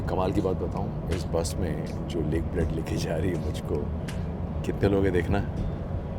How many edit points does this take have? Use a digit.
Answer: 0